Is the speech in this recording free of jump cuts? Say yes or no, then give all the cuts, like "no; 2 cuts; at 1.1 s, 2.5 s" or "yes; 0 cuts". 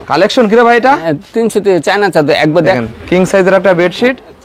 no; 1 cut; at 2.8 s